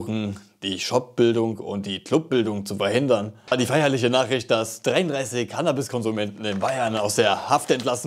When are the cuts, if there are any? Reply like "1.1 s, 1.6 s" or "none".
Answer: 3.4 s

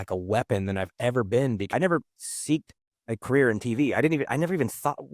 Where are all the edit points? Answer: 1.7 s

